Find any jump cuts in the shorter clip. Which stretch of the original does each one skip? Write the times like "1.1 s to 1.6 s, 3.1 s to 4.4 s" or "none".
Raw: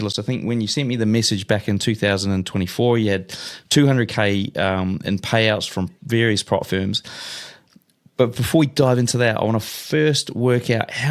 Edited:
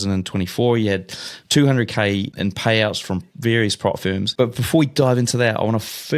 4.5 s to 5.0 s, 7.0 s to 8.1 s

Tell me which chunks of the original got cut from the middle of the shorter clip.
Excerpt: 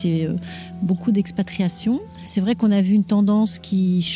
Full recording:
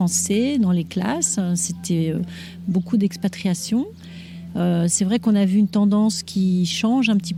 4.2 s to 4.9 s

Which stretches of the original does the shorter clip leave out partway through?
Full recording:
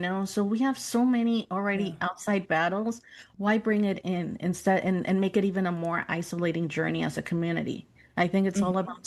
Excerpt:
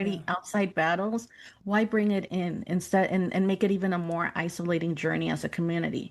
none

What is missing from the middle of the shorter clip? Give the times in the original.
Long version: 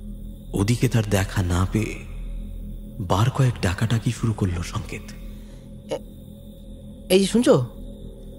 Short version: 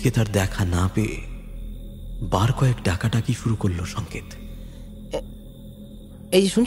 none

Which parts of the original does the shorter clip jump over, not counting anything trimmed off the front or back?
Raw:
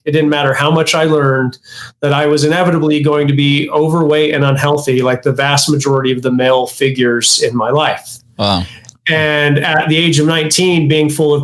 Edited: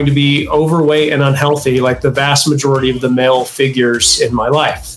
none

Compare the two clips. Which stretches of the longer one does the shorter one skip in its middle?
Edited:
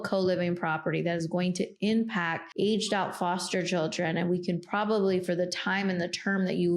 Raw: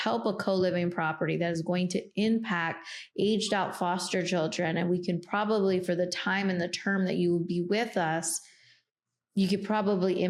2.8 s to 3.0 s

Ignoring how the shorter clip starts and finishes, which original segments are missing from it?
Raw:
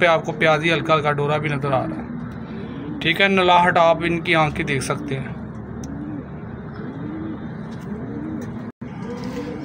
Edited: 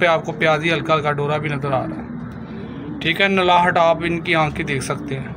none

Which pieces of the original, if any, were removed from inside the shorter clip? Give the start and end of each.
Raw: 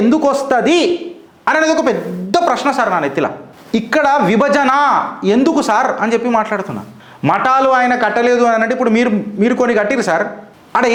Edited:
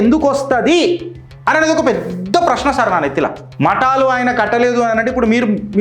3.4 s to 7.1 s

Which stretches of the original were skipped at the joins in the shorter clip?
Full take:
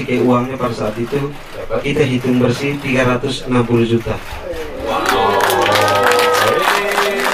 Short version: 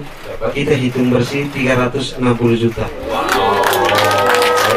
4.2 s to 4.7 s

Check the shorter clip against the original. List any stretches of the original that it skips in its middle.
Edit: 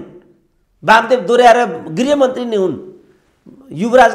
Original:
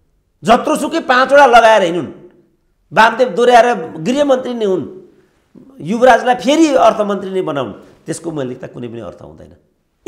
none

